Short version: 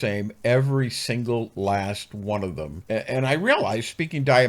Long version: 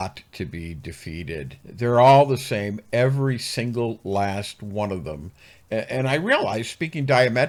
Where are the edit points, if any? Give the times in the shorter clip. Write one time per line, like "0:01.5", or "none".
0:02.7